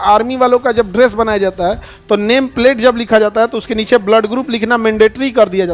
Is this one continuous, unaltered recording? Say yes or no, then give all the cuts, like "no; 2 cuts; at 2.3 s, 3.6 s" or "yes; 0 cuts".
yes; 0 cuts